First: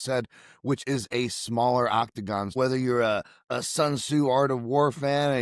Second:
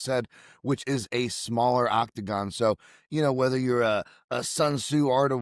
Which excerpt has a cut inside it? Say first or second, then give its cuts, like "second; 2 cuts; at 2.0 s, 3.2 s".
first; 1 cut; at 2.5 s